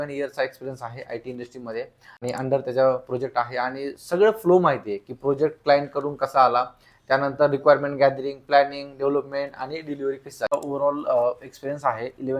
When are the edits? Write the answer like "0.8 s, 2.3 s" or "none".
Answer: 2.0 s, 10.5 s